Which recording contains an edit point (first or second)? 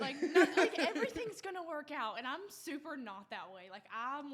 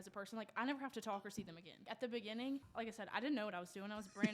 second